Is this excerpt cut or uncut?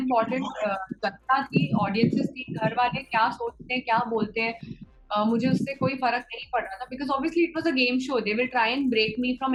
uncut